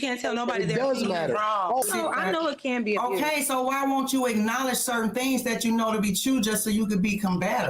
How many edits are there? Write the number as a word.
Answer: one